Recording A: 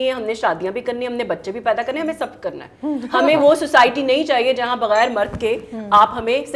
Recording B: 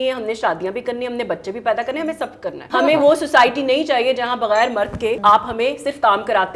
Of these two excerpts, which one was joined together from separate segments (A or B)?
B